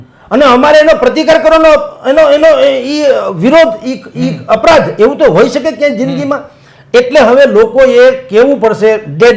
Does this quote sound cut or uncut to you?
uncut